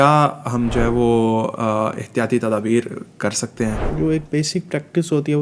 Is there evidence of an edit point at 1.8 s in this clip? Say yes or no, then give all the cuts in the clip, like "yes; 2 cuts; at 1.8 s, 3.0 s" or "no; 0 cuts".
no; 1 cut; at 3.9 s